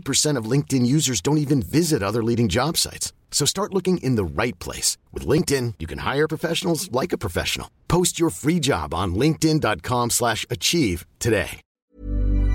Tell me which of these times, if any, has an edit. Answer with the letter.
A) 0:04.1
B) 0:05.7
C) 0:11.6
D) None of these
C